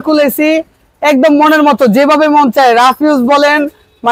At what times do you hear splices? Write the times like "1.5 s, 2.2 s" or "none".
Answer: none